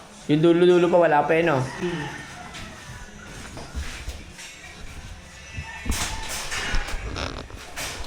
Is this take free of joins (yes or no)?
yes